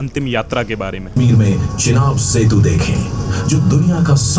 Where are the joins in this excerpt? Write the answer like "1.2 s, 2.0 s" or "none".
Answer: 1.1 s